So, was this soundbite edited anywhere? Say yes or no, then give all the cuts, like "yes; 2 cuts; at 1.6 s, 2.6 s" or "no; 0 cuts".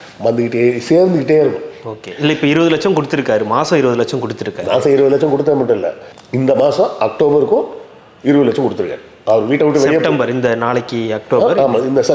no; 0 cuts